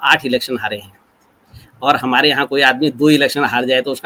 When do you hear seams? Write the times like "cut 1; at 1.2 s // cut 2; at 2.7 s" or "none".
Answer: none